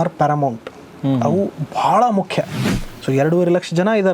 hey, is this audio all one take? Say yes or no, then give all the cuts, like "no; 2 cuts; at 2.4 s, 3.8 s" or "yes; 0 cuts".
no; 1 cut; at 2.8 s